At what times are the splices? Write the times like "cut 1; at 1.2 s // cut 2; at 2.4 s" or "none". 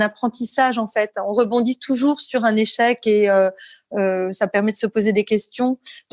none